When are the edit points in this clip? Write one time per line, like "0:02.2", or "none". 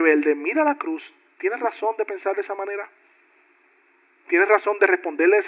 none